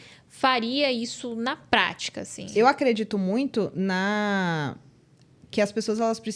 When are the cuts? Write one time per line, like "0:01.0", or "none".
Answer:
0:02.4